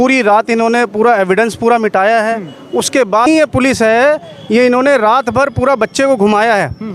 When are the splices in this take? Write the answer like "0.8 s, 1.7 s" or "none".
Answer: 3.3 s